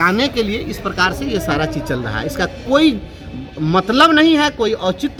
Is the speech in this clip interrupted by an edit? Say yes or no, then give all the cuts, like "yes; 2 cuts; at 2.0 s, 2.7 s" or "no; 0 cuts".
no; 0 cuts